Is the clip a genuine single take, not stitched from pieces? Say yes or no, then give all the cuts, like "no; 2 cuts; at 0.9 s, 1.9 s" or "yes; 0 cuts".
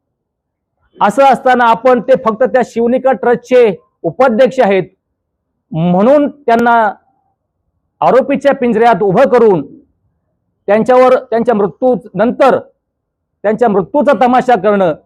yes; 0 cuts